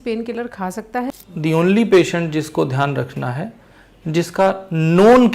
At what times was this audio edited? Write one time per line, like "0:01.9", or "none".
0:01.0